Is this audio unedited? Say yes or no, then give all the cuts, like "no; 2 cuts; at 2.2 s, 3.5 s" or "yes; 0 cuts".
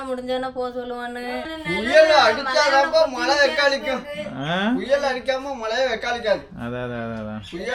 no; 1 cut; at 1.5 s